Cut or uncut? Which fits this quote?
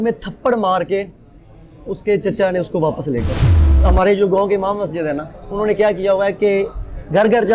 cut